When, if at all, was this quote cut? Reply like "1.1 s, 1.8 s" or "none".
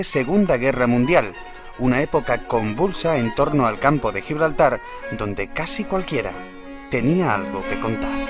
3.3 s